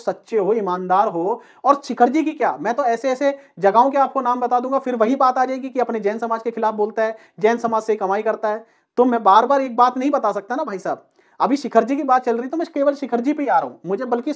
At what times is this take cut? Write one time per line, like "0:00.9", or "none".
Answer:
none

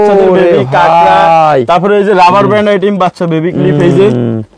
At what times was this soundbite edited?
none

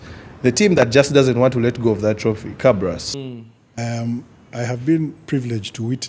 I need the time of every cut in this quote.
0:03.1

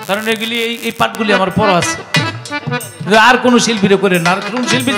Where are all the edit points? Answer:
none

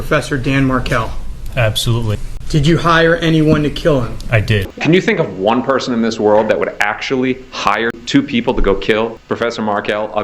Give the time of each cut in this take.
0:02.3
0:04.7
0:08.0
0:09.2

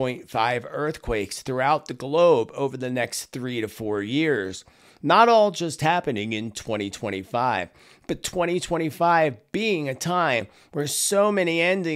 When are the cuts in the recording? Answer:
none

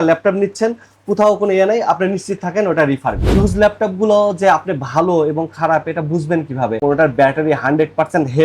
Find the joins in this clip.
0:03.4
0:06.8

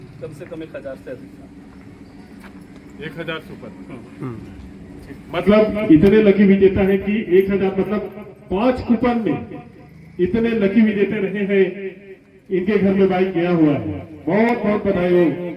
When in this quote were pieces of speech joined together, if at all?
none

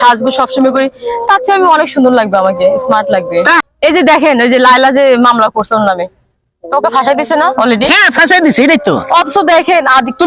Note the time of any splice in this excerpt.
0:03.6

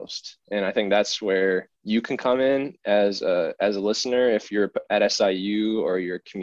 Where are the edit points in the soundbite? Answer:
0:01.7

